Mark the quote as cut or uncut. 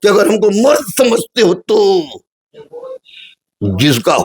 cut